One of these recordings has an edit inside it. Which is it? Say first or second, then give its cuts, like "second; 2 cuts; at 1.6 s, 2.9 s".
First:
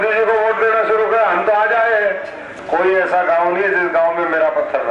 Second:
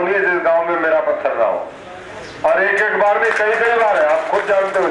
first; 1 cut; at 2.5 s